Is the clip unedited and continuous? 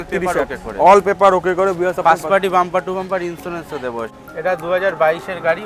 no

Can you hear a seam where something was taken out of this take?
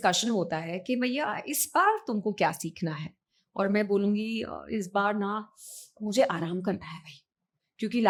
no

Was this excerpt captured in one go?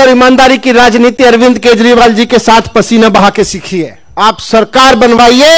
no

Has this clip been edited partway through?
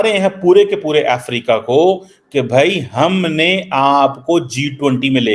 no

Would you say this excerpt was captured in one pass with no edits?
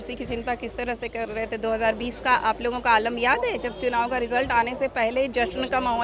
yes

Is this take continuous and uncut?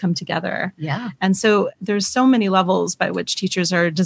no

